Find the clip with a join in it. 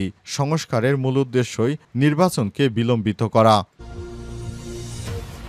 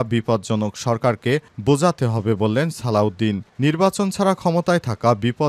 first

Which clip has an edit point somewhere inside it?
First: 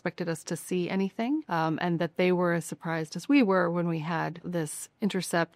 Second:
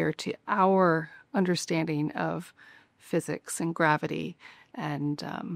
first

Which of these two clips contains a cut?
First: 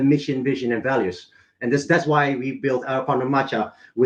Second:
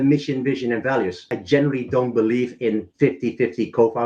second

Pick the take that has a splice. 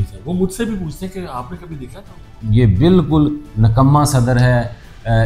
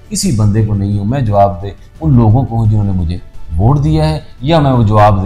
first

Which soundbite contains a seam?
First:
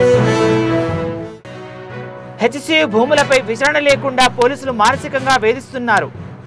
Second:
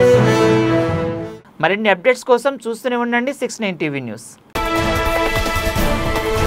first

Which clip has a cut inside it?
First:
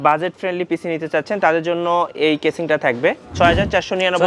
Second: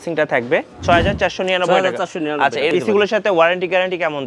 second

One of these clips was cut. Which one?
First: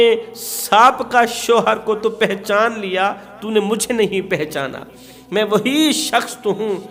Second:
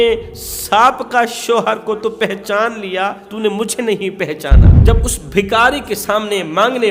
second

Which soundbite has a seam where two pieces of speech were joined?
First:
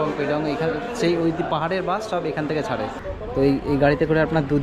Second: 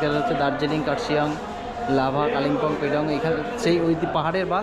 first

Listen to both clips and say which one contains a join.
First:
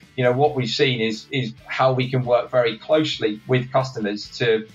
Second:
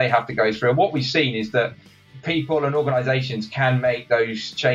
second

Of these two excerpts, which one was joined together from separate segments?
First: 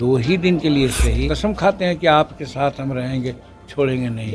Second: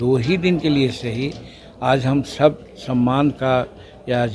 first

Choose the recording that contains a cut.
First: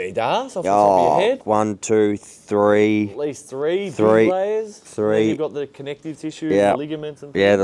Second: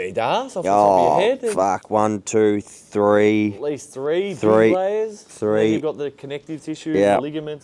first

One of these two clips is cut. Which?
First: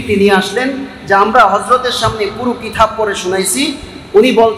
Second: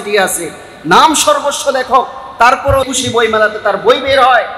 second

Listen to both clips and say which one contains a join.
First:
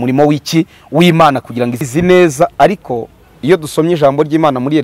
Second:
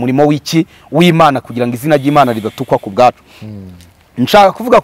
first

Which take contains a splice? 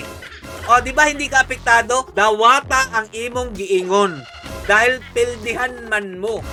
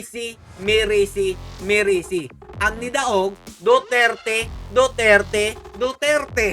second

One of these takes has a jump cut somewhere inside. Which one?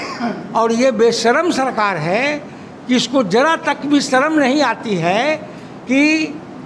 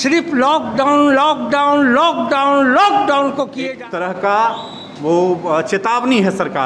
second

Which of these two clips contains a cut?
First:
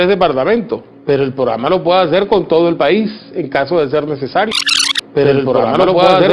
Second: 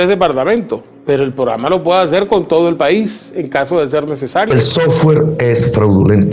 second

